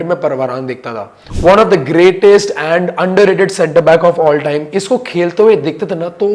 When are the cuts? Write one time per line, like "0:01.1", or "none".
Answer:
0:01.1